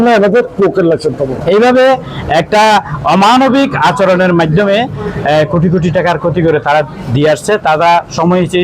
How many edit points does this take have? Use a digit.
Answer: 1